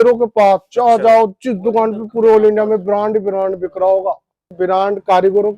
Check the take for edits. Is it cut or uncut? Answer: cut